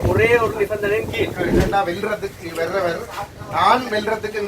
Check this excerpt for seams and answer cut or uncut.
cut